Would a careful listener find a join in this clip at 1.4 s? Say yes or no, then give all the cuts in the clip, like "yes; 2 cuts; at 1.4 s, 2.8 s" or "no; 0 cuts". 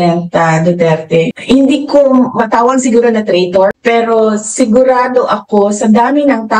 yes; 1 cut; at 1.4 s